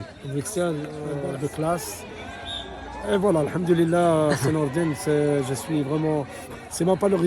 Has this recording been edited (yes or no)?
yes